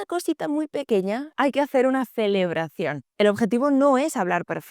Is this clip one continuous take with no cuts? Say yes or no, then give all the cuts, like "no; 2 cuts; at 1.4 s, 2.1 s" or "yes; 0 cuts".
no; 1 cut; at 3.1 s